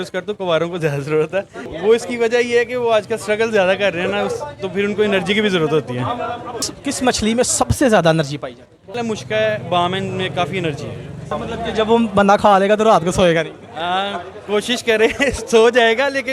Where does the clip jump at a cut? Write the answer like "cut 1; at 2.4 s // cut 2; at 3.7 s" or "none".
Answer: cut 1; at 1.6 s // cut 2; at 6.7 s // cut 3; at 9.0 s // cut 4; at 11.3 s

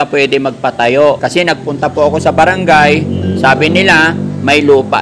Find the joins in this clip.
cut 1; at 1.2 s

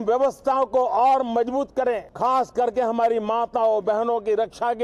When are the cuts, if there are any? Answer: cut 1; at 2.1 s

